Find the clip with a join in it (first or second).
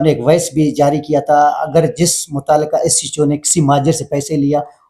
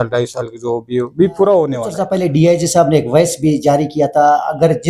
second